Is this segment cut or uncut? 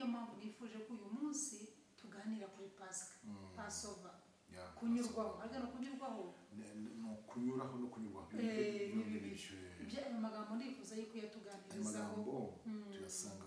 uncut